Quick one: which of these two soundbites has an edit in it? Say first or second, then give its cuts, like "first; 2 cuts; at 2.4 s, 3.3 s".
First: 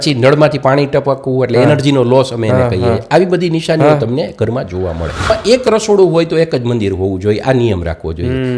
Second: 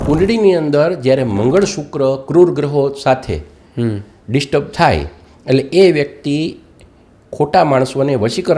first; 1 cut; at 5.3 s